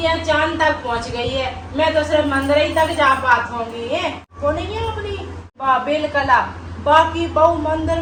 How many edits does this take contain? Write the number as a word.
zero